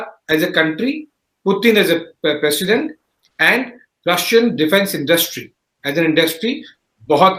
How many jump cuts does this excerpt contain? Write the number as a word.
zero